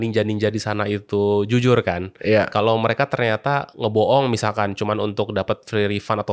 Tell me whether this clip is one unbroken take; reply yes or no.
yes